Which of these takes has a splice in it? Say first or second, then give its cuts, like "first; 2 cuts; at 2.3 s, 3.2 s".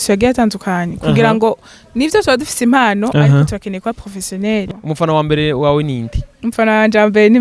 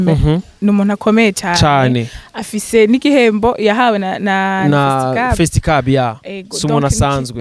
first; 1 cut; at 4.7 s